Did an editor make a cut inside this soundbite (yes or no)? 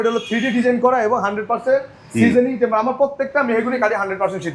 no